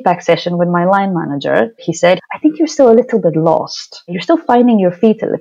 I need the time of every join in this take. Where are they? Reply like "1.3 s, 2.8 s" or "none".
1.9 s